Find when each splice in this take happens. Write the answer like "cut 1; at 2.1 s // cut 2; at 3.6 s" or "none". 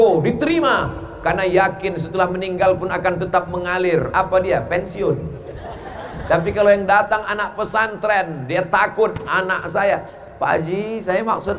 none